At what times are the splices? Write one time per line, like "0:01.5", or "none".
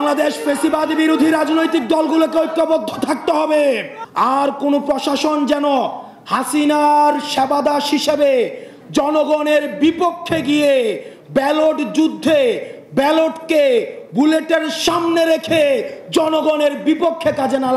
0:04.0